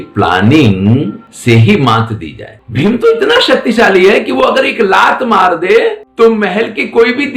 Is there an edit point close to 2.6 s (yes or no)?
yes